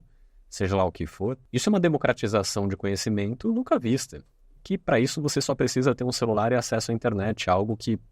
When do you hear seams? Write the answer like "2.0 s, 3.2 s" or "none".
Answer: 1.4 s

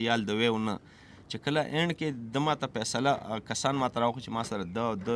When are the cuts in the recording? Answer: none

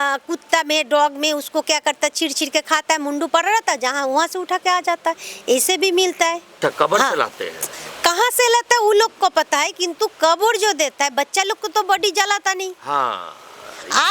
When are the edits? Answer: 6.5 s

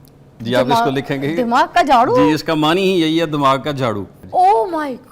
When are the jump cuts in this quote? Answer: 4.2 s

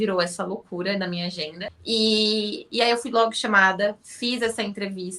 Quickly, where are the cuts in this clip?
1.7 s

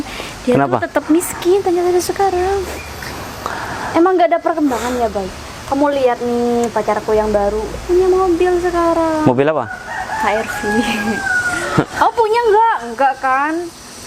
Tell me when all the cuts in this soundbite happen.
none

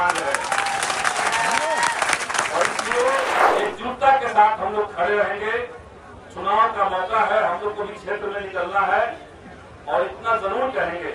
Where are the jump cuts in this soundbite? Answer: 3.4 s

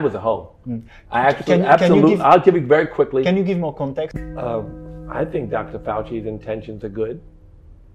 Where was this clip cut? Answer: 4.2 s

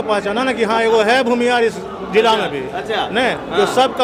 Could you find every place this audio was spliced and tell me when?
none

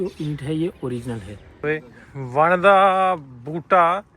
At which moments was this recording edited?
1.6 s

